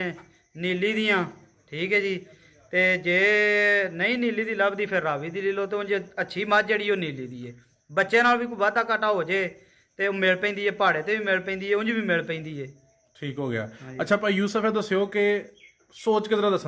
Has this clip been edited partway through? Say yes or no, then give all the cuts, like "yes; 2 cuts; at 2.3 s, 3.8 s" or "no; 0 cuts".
no; 0 cuts